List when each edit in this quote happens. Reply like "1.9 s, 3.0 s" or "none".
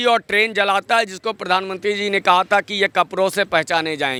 none